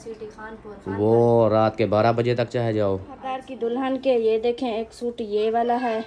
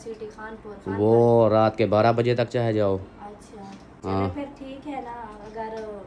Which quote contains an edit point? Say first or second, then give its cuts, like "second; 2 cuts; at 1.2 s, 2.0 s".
first; 1 cut; at 3.5 s